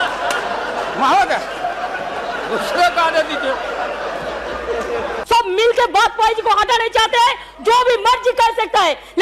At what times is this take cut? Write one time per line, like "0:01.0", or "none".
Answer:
0:05.1

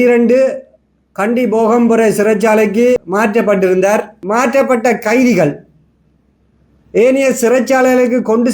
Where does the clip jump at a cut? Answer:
0:03.0
0:04.2

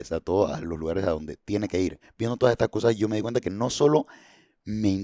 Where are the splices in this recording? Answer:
0:02.1

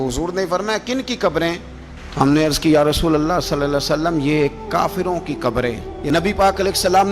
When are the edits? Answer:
0:05.9

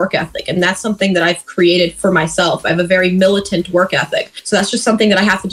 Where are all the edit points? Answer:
0:04.3

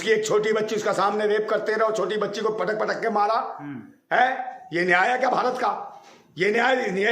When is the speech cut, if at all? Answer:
none

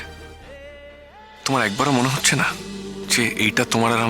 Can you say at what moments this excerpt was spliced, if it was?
0:01.4
0:03.0

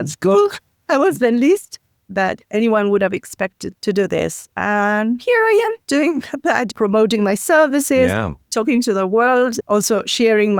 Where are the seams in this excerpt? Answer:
none

